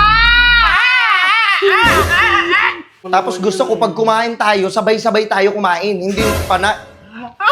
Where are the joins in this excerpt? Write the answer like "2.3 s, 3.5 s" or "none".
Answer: 2.9 s